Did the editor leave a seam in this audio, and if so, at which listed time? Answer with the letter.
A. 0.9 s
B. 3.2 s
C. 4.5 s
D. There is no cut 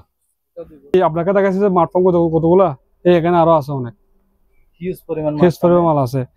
A